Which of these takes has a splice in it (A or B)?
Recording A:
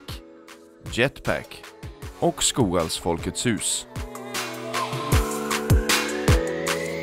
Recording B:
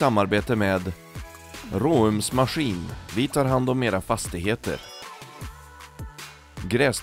A